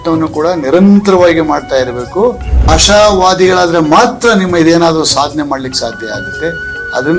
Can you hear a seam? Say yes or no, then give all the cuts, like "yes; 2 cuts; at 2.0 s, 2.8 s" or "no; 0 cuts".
yes; 1 cut; at 2.7 s